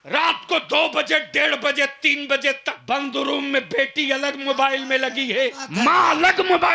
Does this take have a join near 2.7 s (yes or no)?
yes